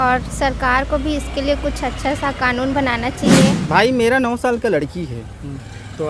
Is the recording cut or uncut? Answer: cut